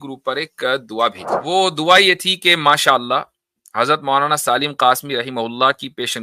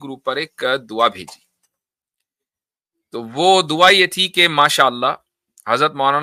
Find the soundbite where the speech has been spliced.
first; 1 cut; at 1.4 s

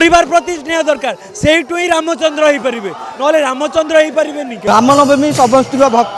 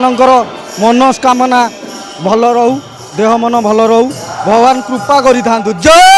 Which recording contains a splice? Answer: first; 1 cut; at 4.6 s

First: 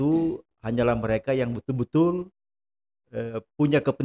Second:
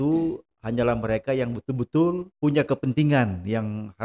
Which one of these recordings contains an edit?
second; 1 cut; at 2.3 s

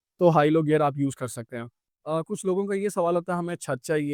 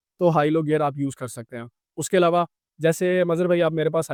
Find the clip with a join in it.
first; 1 cut; at 1.9 s

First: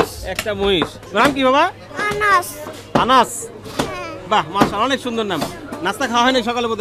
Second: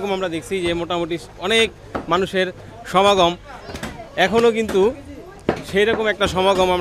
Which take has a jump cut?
first; 2 cuts; at 1.0 s, 1.9 s

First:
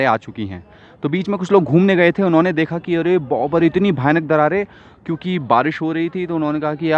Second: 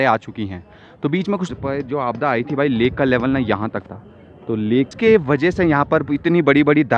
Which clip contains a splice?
second; 2 cuts; at 1.5 s, 4.9 s

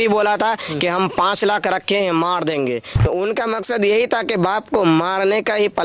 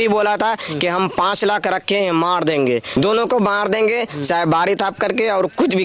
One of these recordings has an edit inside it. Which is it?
first; 1 cut; at 3.0 s

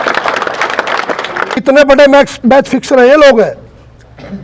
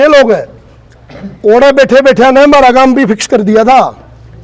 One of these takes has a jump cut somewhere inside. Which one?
first; 1 cut; at 1.6 s

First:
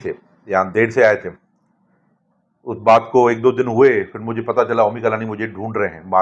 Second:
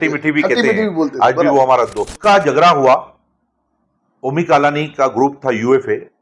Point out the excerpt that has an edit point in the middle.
second; 1 cut; at 2.1 s

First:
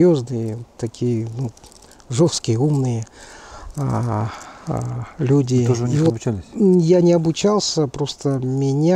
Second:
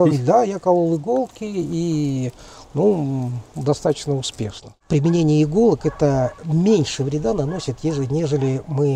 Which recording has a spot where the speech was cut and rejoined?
second; 1 cut; at 4.7 s

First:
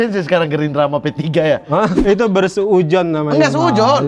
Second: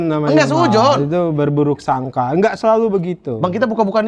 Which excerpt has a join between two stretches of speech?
first; 1 cut; at 1.9 s

